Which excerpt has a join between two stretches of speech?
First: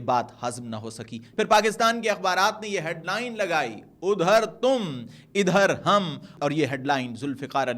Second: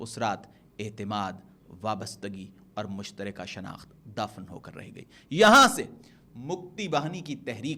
first; 1 cut; at 1.2 s

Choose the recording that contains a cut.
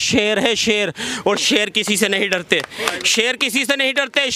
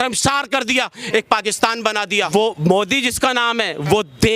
second; 1 cut; at 2.3 s

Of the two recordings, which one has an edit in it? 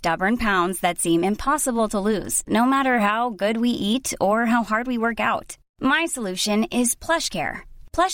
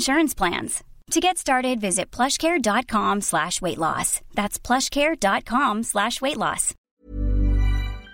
second; 1 cut; at 6.9 s

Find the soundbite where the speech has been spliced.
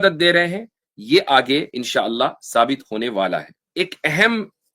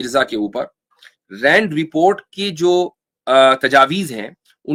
first; 1 cut; at 3.6 s

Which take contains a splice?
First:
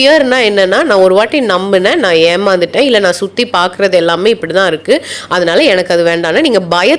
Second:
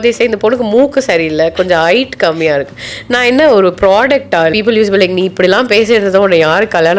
second; 1 cut; at 4.5 s

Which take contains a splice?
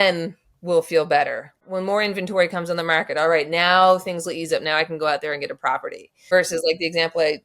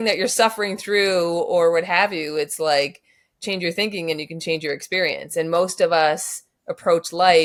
first; 2 cuts; at 1.6 s, 6.2 s

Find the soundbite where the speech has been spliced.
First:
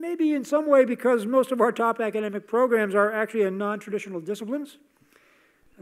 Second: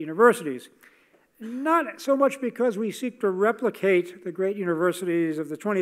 second; 1 cut; at 3.3 s

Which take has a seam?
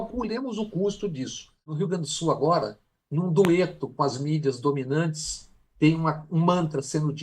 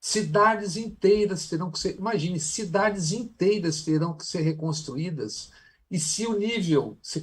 first; 1 cut; at 1.7 s

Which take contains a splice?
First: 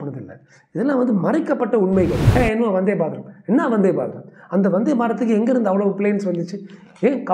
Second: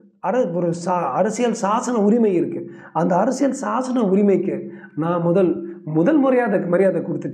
first; 1 cut; at 2.2 s

